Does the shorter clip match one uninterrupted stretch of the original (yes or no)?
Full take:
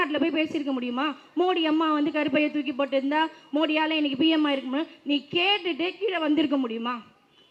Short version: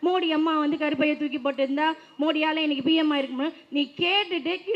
yes